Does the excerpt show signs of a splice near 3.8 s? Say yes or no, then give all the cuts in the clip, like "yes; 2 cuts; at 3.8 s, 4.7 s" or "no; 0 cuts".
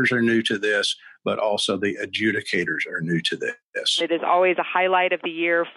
yes; 1 cut; at 3.8 s